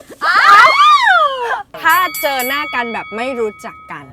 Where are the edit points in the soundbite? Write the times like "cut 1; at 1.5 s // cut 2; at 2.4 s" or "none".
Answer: cut 1; at 1.7 s

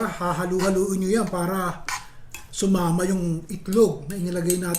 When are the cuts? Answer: none

